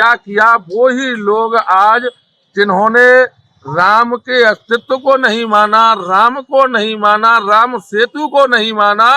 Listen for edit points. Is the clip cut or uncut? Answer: uncut